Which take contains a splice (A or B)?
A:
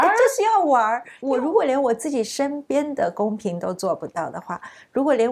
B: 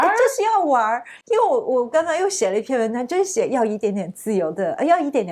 A